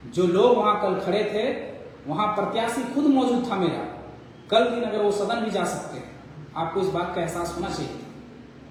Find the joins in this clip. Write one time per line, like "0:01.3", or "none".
none